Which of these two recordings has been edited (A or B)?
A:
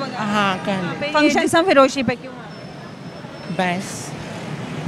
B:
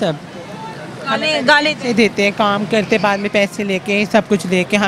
A